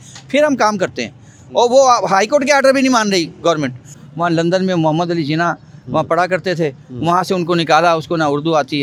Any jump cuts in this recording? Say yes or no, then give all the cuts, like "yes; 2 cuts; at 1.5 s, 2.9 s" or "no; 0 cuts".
yes; 1 cut; at 4.0 s